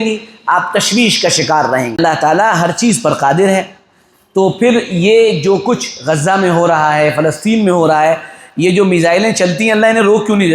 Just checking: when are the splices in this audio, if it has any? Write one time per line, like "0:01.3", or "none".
0:02.0